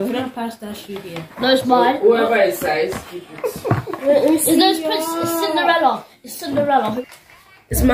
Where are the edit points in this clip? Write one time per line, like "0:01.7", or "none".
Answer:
0:07.0